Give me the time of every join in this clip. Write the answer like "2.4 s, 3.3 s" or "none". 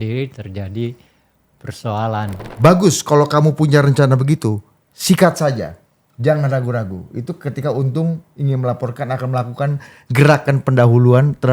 2.4 s